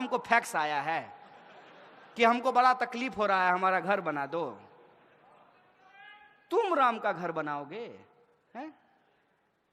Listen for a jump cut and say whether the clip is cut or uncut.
uncut